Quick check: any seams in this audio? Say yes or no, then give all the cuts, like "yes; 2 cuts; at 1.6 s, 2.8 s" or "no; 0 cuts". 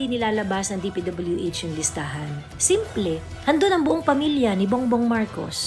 no; 0 cuts